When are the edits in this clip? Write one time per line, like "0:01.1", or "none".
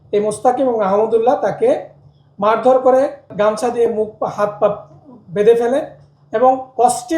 0:03.3